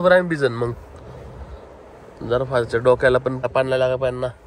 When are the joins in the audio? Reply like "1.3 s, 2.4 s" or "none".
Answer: 3.4 s

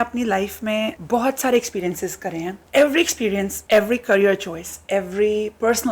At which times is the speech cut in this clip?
2.6 s

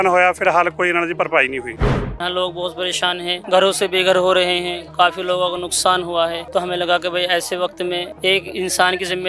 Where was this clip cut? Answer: 2.2 s, 3.4 s, 6.4 s, 8.1 s

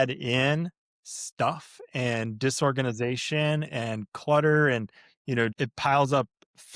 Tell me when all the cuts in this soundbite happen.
5.5 s

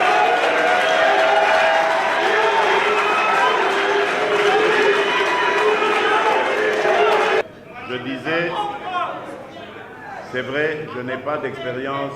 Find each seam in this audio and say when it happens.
7.4 s

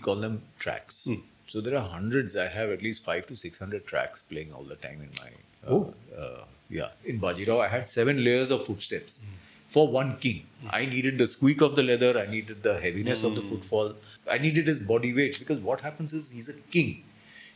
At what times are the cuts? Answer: 7.0 s, 14.1 s

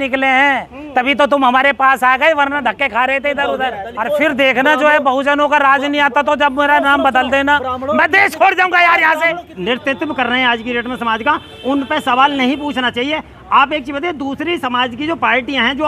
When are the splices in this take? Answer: 3.9 s, 9.5 s

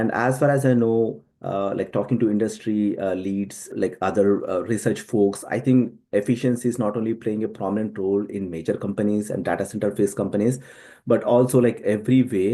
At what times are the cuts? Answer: 3.7 s

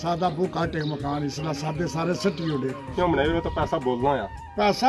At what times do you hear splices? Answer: 2.9 s

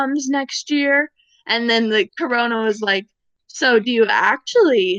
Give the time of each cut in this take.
2.1 s

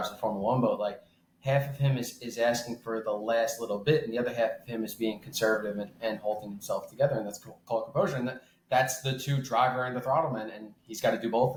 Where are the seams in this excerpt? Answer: none

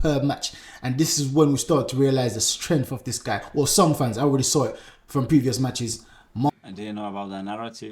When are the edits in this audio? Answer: 6.5 s

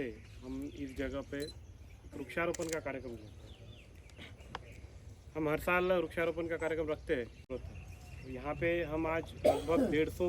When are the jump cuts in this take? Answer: 7.5 s

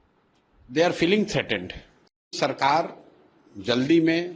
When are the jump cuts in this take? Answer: 2.3 s

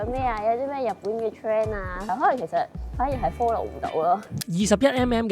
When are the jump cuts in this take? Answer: 2.1 s, 4.4 s

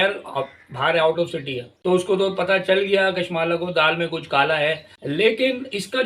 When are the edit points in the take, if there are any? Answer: 1.6 s, 4.9 s

